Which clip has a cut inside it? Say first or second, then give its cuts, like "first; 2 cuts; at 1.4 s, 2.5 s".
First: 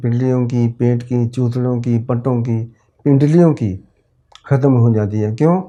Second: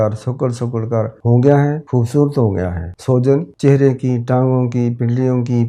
second; 4 cuts; at 1.2 s, 1.8 s, 2.9 s, 3.5 s